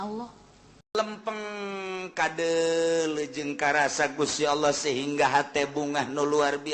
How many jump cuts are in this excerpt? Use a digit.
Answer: 1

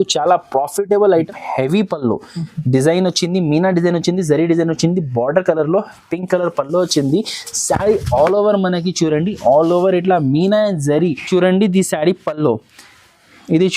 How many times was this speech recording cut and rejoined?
2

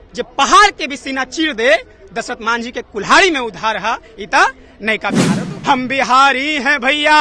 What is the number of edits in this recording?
1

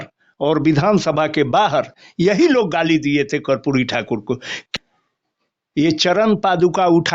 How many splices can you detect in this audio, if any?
1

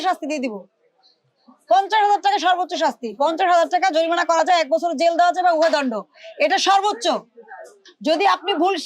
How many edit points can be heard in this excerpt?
0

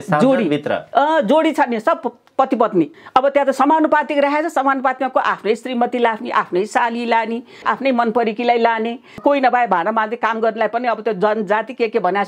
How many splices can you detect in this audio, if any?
3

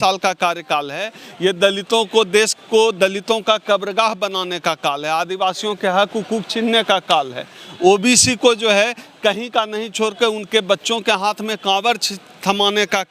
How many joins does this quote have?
0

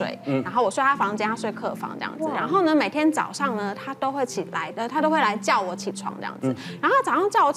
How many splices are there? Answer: 0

